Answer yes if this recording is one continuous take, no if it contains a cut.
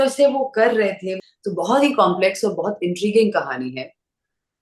no